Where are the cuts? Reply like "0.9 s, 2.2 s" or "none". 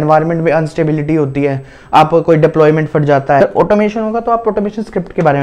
3.4 s